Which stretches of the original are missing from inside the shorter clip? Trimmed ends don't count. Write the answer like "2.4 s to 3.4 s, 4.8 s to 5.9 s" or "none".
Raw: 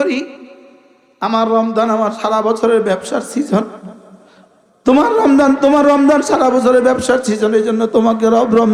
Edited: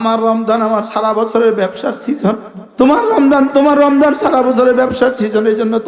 3.8 s to 4.6 s